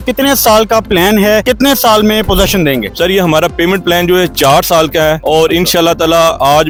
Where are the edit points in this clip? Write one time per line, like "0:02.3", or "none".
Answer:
none